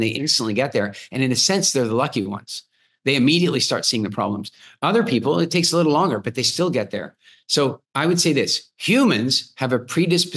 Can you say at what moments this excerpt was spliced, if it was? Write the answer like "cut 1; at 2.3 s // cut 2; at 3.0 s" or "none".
cut 1; at 7.9 s